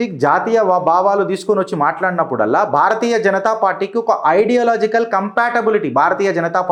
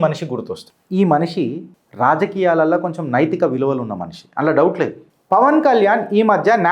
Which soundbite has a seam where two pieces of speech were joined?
second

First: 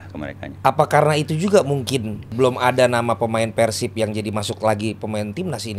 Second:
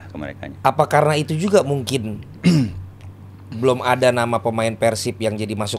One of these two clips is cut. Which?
first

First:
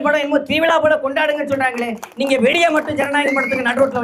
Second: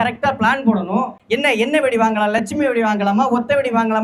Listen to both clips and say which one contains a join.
second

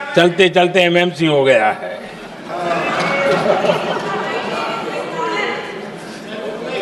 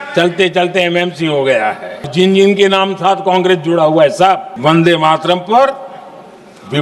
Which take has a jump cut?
second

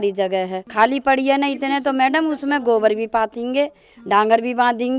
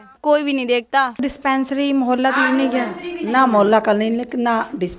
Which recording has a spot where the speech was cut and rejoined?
second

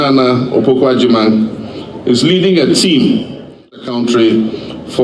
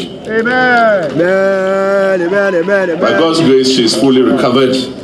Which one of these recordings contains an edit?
first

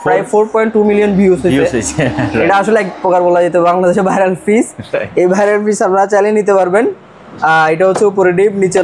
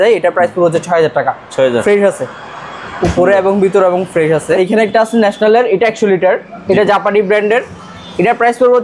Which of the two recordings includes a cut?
second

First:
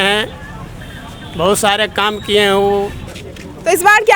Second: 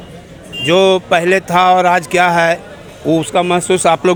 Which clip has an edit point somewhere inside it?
first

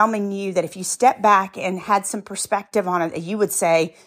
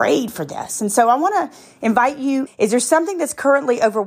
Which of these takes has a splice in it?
second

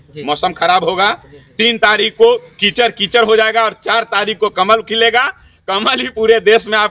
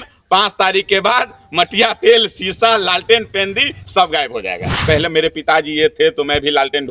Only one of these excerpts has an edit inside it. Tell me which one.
second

